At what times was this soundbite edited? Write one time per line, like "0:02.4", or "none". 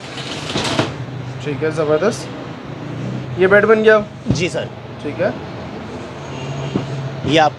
none